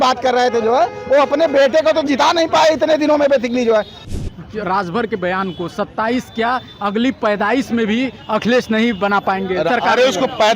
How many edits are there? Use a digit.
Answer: 2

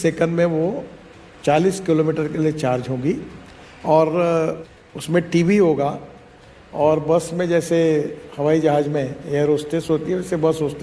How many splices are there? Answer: 1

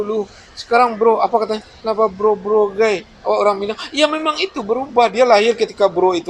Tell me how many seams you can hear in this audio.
0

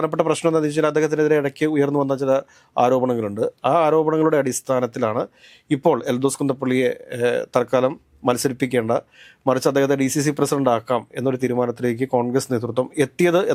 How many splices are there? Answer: 0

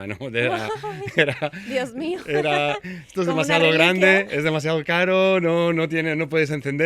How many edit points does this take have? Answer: 0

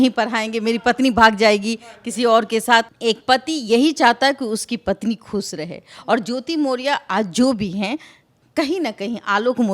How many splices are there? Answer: 1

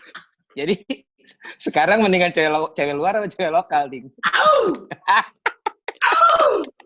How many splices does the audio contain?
0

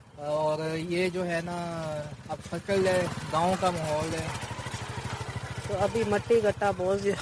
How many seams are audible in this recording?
0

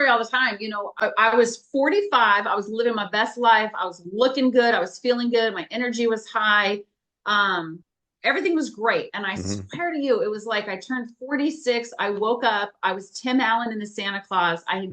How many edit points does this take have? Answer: 1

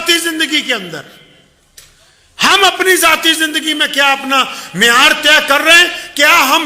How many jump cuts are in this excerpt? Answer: 0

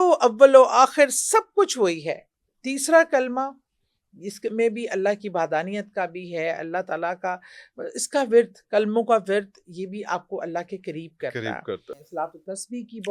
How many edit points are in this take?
1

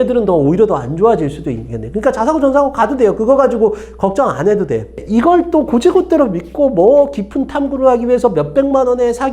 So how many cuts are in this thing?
1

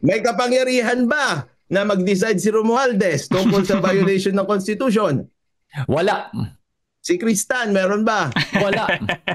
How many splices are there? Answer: 0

